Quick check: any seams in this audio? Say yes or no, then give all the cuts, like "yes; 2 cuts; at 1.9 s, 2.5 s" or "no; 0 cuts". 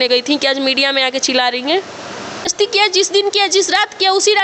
yes; 1 cut; at 2.5 s